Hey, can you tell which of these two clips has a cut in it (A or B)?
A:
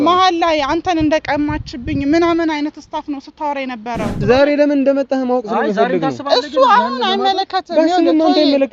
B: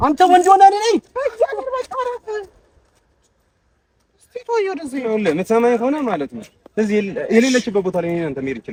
A